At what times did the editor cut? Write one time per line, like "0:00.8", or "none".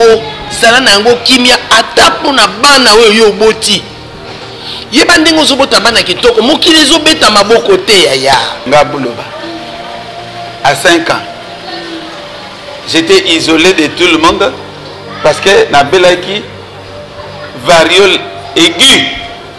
0:08.6